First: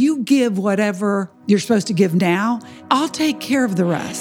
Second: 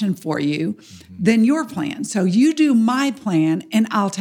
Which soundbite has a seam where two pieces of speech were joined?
first; 2 cuts; at 1.3 s, 2.7 s

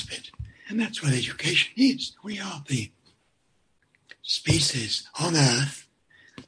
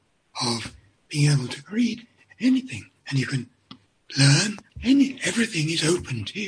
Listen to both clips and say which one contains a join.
second; 1 cut; at 4.7 s

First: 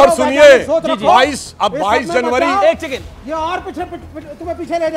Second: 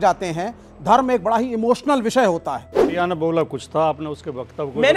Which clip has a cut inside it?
second; 1 cut; at 2.7 s

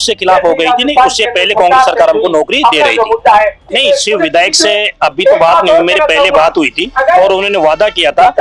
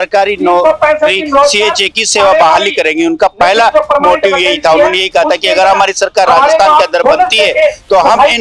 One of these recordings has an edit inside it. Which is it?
first; 1 cut; at 3.6 s

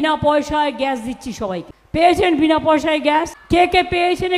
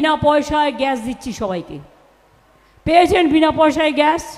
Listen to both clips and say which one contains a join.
first; 2 cuts; at 1.7 s, 3.4 s

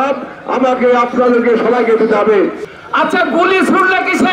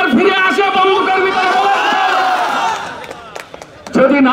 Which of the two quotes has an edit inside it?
first; 1 cut; at 2.6 s

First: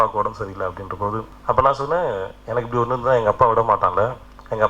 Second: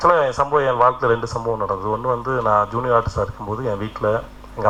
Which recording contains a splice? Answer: first; 1 cut; at 1.3 s

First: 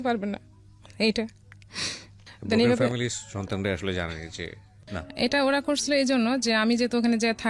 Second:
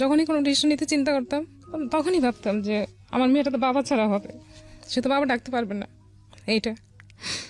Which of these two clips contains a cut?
first; 1 cut; at 5.0 s

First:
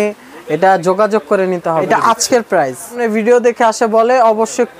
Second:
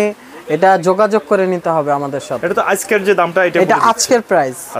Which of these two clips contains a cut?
first; 2 cuts; at 1.9 s, 3.0 s

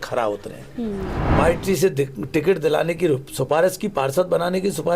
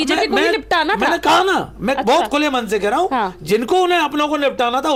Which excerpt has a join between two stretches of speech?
first; 1 cut; at 1.2 s

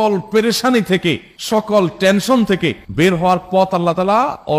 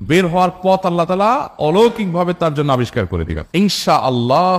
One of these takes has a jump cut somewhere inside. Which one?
second; 1 cut; at 3.4 s

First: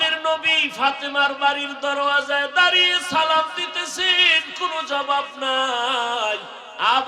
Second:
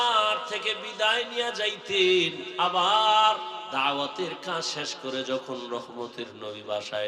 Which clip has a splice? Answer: second; 2 cuts; at 2.4 s, 3.7 s

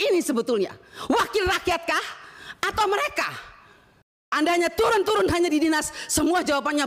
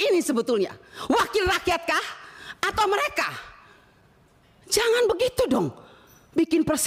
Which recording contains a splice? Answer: first; 1 cut; at 4.3 s

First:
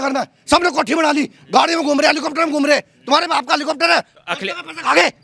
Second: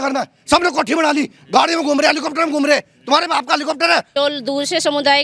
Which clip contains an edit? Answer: second; 1 cut; at 4.1 s

